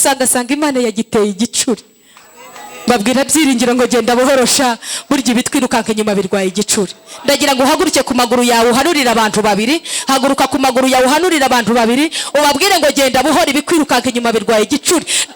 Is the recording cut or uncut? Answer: uncut